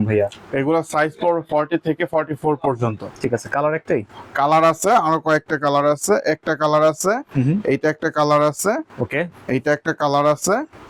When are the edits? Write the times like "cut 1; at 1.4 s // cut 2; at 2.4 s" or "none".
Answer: none